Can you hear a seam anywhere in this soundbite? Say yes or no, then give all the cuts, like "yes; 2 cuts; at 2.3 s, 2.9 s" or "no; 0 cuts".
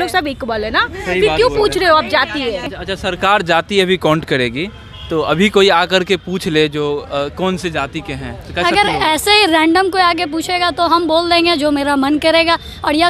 yes; 1 cut; at 2.7 s